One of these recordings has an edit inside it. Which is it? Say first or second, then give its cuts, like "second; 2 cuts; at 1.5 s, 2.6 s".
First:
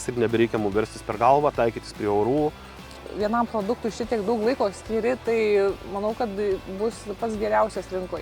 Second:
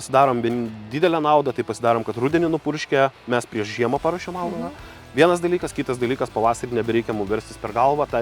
first; 1 cut; at 3.0 s